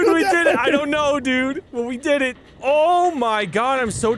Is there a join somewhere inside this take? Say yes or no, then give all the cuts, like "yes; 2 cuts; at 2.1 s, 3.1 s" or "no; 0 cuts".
yes; 1 cut; at 2.5 s